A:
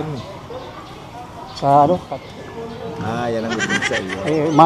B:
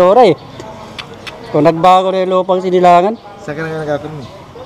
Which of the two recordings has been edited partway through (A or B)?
A